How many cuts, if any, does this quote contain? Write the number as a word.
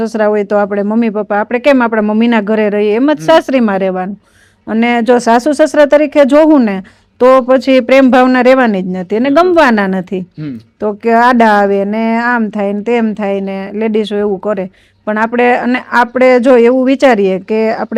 zero